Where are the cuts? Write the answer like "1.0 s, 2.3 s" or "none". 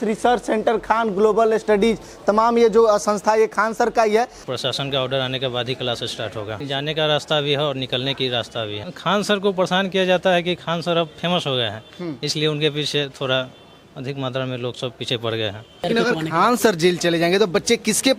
4.4 s, 6.5 s, 8.8 s, 15.9 s